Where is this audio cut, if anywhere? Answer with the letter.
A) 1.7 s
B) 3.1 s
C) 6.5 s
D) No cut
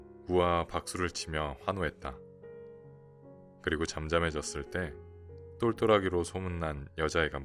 D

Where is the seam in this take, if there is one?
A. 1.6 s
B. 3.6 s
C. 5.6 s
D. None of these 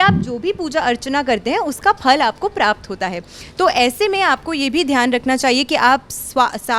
D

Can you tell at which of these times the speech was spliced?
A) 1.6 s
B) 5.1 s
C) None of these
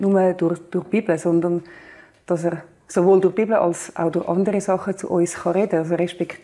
C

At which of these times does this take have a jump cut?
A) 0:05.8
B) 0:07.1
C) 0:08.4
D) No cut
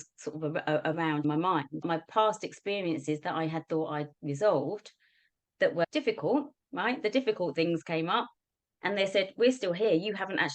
A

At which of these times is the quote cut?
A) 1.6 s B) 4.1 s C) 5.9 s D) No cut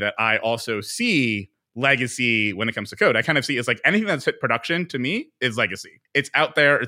C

